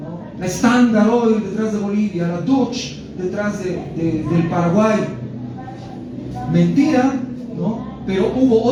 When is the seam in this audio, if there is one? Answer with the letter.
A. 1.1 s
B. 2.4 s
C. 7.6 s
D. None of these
D